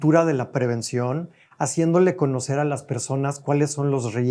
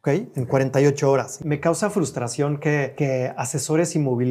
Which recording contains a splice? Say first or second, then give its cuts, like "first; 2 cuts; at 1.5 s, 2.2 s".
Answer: second; 2 cuts; at 1.3 s, 2.9 s